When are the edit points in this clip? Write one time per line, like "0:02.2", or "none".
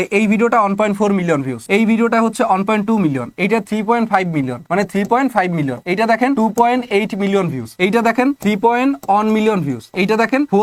none

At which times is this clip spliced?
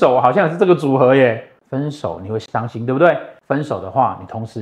0:03.3

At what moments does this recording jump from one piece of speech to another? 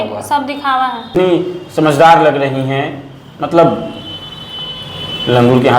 0:01.1

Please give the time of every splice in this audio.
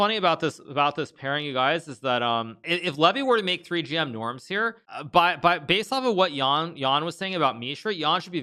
0:02.6
0:04.9

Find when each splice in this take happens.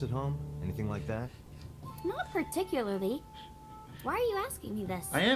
none

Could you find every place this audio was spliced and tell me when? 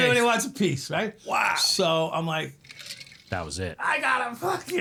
none

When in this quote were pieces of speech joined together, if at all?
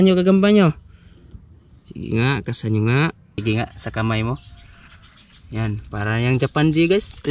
0:03.3

